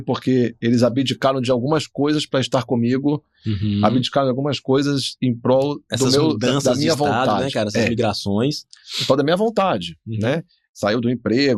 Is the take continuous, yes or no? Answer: yes